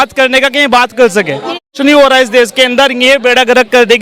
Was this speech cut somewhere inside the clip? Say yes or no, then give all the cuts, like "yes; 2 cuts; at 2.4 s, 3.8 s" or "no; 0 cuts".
yes; 1 cut; at 1.7 s